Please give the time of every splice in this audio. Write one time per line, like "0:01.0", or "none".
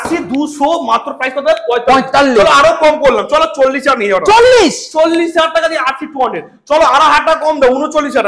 none

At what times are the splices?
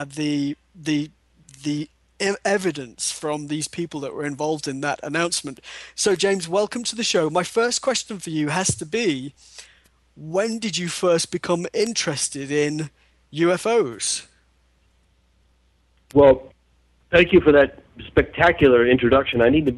0:11.5

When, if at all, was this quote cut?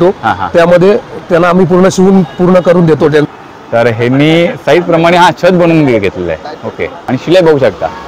0:03.3
0:06.9

